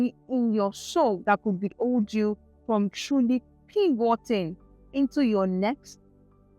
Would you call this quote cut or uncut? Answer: cut